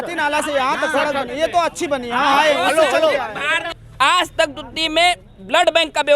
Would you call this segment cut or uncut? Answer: cut